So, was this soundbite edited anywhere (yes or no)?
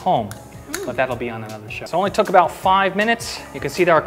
yes